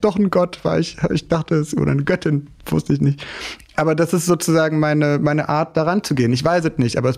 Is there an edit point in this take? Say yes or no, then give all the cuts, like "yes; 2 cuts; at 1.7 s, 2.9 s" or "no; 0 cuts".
no; 0 cuts